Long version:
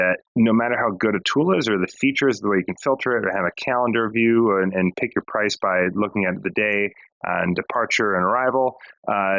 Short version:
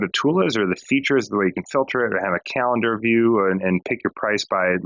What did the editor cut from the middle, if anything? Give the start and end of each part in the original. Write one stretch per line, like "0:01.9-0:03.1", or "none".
none